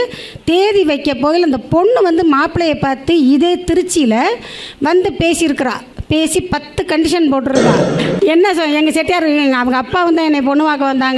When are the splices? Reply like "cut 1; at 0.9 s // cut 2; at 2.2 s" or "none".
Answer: cut 1; at 8.1 s